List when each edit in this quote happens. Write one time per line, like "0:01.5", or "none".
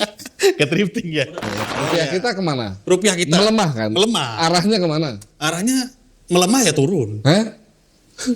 0:01.7

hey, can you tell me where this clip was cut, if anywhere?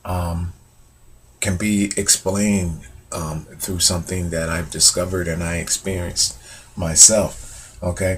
0:04.1

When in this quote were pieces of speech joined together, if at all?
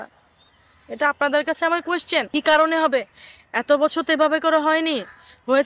0:02.3

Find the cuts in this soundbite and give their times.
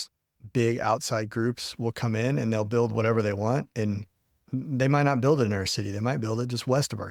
none

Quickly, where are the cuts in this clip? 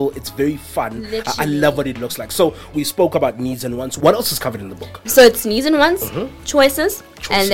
0:02.7
0:04.0

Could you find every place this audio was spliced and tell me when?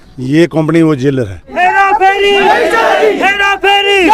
0:01.4

